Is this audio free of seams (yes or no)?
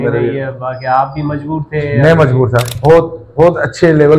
no